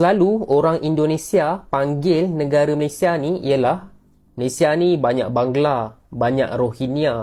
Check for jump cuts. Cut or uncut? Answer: uncut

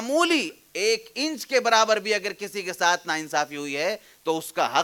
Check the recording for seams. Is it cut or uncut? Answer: uncut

